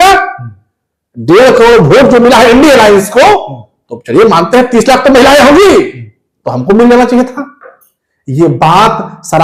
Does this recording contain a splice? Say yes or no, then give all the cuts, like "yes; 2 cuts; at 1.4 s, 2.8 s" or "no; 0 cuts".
no; 0 cuts